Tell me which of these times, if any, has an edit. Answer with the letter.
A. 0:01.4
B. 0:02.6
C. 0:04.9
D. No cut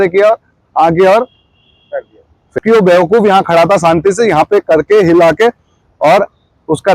B